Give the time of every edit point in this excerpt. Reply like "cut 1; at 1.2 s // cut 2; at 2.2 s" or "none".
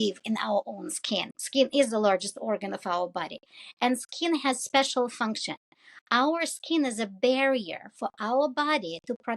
cut 1; at 1.3 s